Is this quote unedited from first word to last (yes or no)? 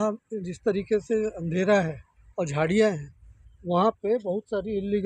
yes